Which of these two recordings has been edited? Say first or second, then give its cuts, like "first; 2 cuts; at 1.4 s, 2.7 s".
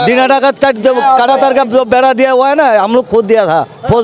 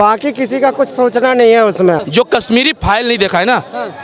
second; 1 cut; at 2.0 s